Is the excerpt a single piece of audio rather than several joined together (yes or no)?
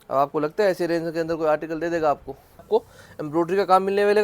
no